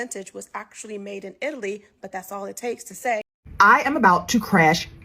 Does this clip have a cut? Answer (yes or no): yes